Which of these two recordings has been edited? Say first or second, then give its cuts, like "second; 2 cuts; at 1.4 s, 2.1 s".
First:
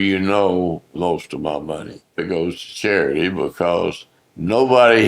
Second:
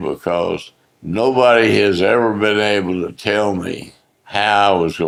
first; 2 cuts; at 0.9 s, 2.2 s